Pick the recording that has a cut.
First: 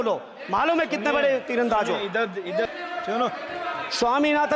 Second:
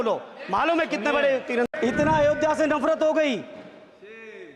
second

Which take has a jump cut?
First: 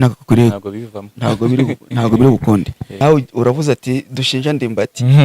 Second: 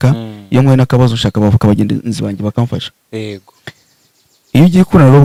first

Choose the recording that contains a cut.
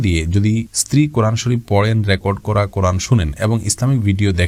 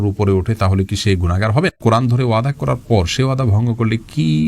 second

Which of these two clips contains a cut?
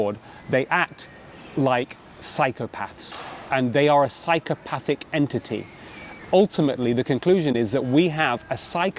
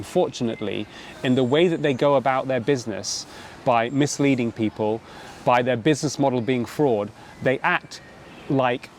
first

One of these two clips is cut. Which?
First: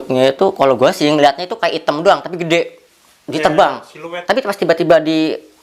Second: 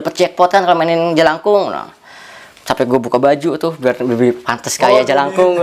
first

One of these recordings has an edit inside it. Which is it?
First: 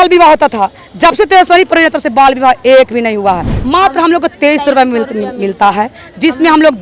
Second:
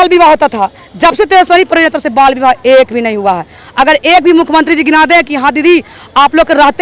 first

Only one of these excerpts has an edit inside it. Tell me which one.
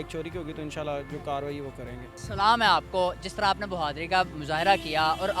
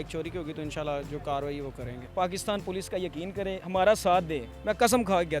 second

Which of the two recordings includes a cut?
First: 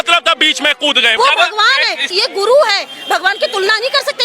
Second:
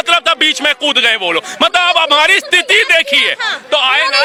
first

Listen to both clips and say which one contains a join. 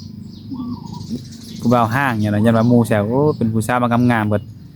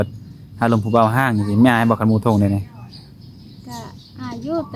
first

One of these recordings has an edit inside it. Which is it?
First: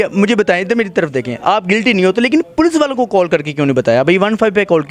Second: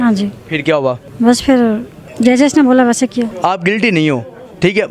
second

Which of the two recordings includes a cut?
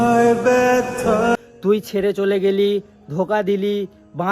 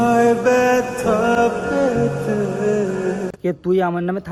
first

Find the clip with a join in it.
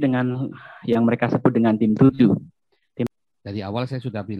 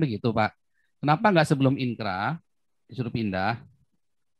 first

